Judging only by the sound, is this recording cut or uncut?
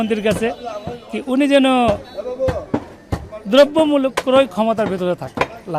uncut